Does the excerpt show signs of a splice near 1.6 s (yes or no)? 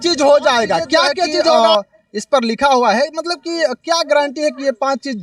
yes